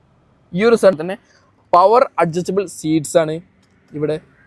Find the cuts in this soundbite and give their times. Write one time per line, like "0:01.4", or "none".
0:01.0